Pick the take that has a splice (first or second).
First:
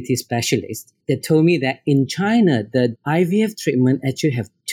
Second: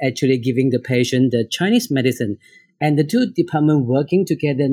first